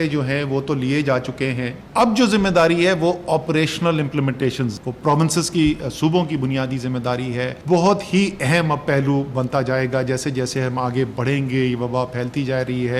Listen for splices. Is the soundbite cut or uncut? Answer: cut